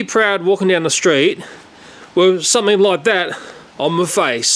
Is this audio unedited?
yes; 0 cuts

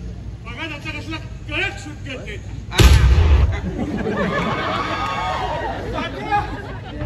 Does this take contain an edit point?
no; 0 cuts

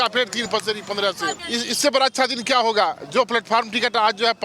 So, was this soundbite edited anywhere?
yes; 1 cut; at 1.3 s

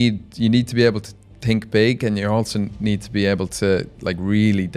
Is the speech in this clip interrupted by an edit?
no; 0 cuts

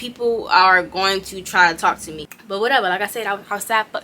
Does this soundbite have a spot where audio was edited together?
yes; 1 cut; at 2.2 s

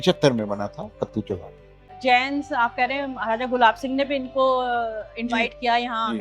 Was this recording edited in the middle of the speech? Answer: yes; 1 cut; at 1.9 s

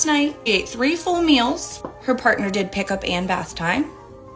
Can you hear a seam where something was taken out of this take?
no; 0 cuts

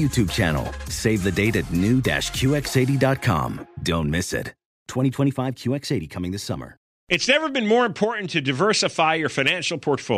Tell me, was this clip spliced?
yes; 1 cut; at 7.0 s

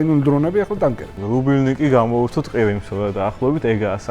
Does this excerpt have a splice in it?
yes; 1 cut; at 1.1 s

